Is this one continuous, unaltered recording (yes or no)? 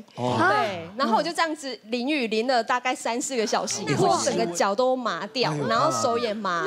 no